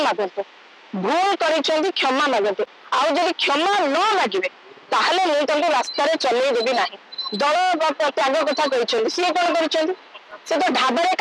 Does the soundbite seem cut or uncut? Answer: uncut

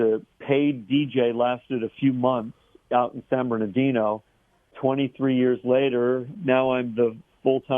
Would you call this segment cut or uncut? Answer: cut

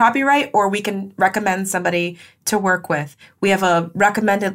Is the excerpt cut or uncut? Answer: uncut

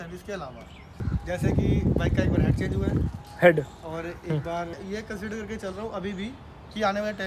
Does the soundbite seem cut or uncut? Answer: cut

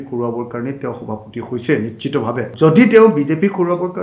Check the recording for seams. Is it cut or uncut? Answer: cut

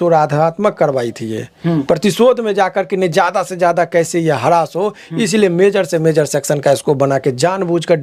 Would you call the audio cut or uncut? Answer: uncut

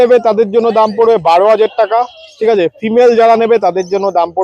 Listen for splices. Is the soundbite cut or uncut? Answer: uncut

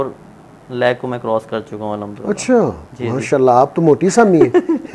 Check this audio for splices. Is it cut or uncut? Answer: uncut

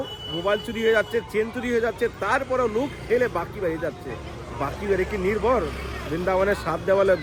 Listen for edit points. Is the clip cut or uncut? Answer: uncut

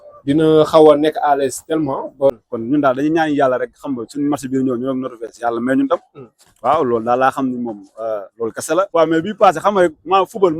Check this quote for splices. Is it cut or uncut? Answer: cut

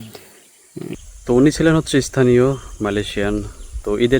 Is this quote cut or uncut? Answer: cut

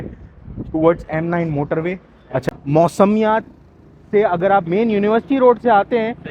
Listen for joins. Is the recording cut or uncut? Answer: cut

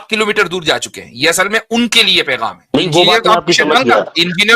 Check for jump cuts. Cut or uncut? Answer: cut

